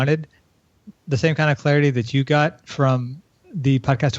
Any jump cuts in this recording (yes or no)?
no